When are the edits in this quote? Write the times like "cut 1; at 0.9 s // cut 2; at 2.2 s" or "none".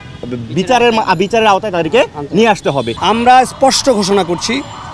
cut 1; at 2.9 s